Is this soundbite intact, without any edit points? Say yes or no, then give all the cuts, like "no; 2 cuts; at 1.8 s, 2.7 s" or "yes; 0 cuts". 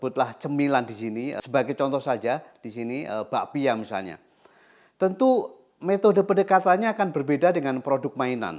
no; 1 cut; at 1.4 s